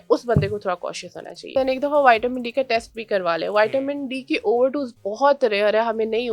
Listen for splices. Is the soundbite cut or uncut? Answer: cut